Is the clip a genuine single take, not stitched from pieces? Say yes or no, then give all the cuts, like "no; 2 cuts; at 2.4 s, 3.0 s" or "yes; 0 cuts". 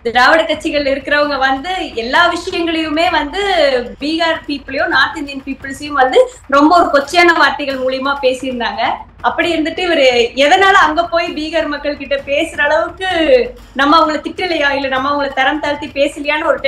yes; 0 cuts